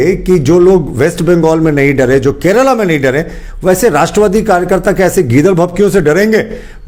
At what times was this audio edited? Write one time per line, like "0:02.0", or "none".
none